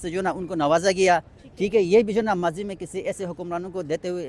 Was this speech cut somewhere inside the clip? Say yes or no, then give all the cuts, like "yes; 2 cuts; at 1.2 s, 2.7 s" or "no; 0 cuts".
no; 0 cuts